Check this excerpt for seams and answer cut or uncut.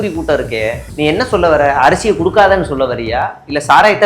uncut